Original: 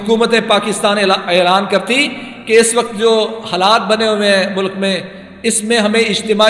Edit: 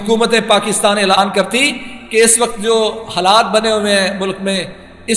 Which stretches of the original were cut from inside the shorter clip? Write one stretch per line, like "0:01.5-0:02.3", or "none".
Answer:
0:01.2-0:01.5